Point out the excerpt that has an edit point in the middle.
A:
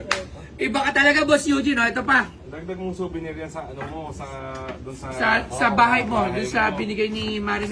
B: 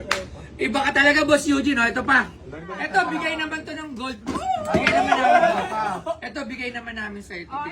B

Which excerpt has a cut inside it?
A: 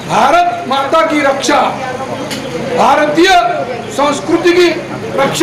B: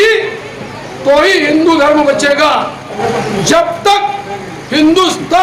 B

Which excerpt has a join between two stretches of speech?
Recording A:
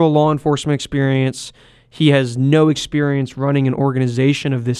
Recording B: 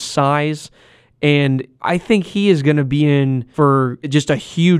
B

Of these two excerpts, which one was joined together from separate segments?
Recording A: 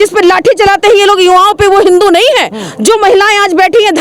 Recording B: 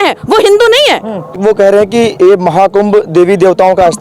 B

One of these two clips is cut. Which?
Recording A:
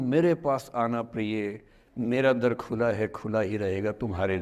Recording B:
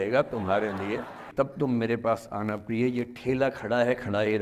B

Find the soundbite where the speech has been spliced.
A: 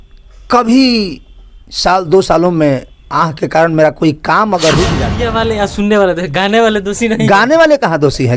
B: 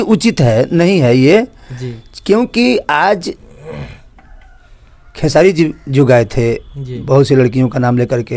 A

